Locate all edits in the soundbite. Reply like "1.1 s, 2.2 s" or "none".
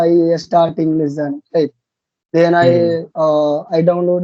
none